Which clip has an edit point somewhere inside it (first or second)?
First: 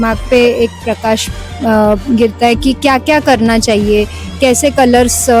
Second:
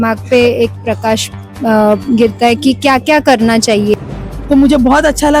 second